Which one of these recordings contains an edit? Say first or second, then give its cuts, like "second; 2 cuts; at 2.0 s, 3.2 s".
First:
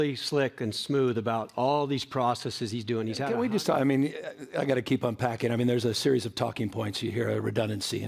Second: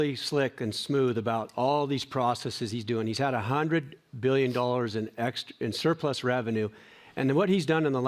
first; 1 cut; at 3.2 s